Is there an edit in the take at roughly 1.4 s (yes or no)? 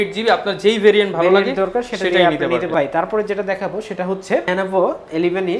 no